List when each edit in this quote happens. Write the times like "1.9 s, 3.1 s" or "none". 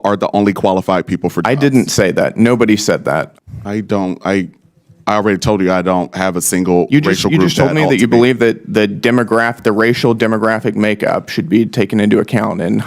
3.3 s